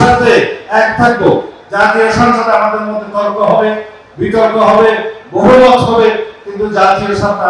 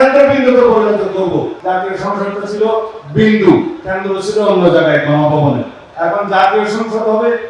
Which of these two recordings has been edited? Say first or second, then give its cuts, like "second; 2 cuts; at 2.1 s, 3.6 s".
second; 2 cuts; at 1.6 s, 5.8 s